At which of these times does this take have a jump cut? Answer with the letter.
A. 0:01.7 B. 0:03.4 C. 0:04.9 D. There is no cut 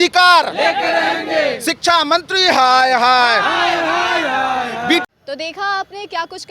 D